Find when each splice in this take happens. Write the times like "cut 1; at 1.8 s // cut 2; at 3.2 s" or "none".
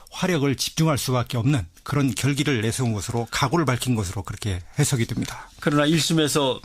cut 1; at 4.1 s